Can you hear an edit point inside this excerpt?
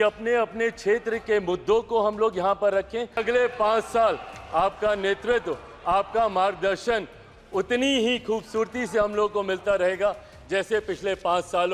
yes; 1 cut; at 3.2 s

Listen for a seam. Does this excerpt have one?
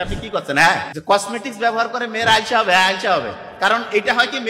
yes; 1 cut; at 0.9 s

